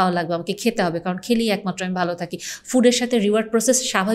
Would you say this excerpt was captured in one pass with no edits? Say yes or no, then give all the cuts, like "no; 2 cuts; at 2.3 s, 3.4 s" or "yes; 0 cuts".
yes; 0 cuts